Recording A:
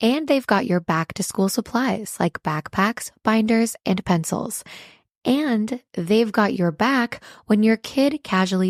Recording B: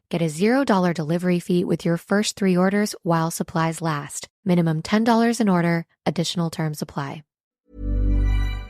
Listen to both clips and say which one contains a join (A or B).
B